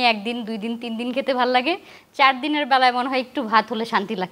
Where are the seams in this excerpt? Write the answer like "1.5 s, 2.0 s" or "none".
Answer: none